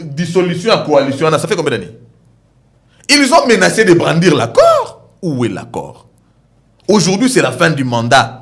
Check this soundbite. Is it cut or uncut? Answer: uncut